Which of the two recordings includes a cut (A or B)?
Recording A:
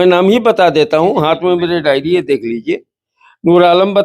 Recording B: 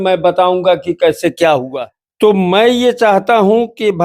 B